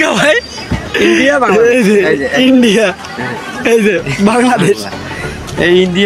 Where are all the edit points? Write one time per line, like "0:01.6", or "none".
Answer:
none